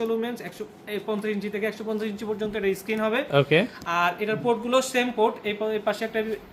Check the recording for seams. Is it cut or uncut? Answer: uncut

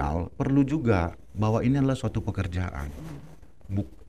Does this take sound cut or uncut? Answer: uncut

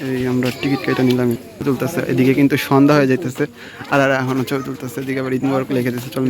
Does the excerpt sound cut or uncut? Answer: cut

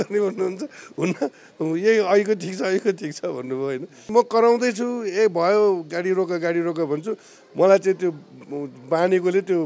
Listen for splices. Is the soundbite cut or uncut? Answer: cut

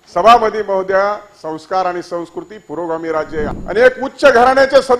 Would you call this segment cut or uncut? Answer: cut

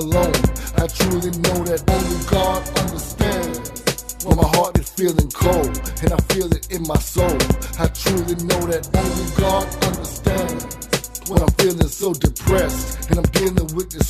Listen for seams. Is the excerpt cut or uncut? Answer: uncut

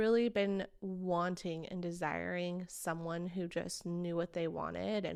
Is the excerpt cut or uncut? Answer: uncut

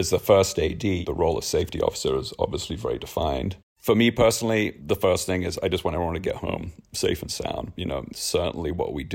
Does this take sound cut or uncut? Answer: cut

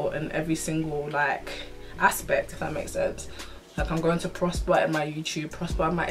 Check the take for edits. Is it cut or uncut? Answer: uncut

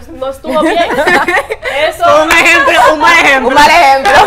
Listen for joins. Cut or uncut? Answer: uncut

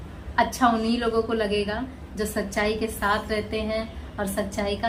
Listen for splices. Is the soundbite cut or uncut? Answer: uncut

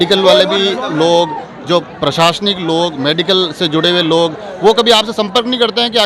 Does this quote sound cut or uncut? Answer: uncut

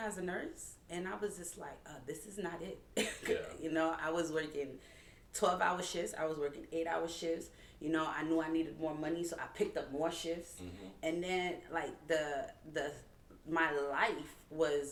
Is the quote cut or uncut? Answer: uncut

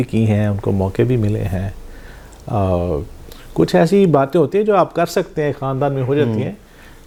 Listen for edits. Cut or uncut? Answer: uncut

